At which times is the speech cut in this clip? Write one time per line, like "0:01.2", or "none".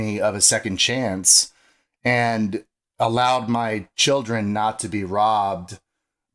none